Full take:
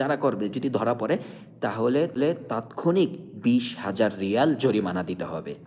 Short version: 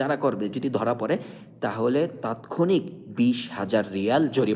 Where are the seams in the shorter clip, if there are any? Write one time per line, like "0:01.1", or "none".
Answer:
0:02.0